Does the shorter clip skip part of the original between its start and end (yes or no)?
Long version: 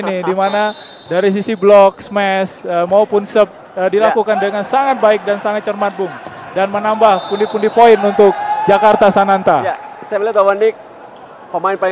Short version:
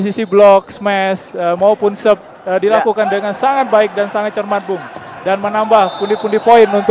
no